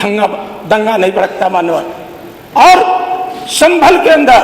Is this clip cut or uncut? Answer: uncut